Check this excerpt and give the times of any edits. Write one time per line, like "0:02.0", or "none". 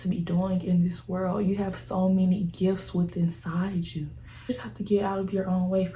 none